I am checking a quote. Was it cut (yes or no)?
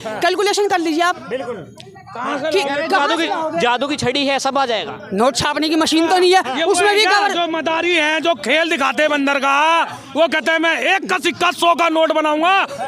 no